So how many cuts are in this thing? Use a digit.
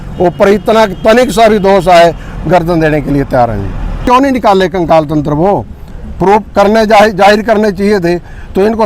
1